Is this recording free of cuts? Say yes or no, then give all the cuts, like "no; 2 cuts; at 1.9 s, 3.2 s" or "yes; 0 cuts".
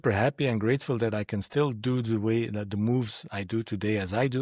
yes; 0 cuts